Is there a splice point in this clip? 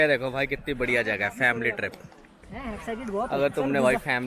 no; 0 cuts

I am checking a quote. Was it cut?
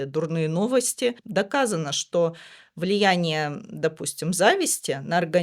yes; 1 cut; at 1.2 s

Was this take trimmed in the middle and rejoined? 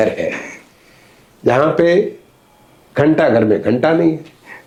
no; 0 cuts

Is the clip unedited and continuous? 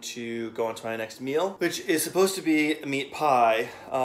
no; 1 cut; at 1.5 s

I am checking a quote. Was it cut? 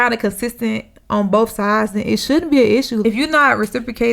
yes; 1 cut; at 3.0 s

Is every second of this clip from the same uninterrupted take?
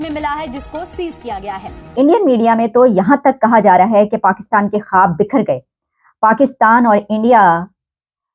no; 1 cut; at 1.9 s

